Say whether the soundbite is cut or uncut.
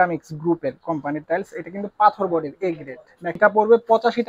cut